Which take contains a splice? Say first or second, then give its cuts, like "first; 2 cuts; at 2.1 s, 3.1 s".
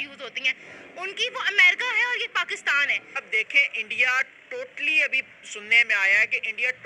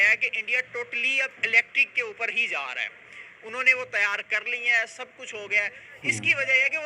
first; 1 cut; at 3.2 s